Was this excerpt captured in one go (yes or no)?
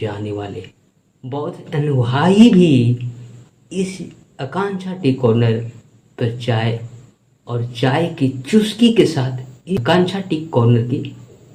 yes